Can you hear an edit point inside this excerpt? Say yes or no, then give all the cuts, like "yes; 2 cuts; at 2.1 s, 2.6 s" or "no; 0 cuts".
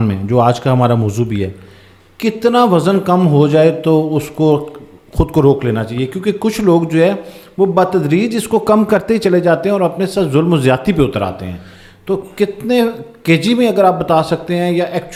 no; 0 cuts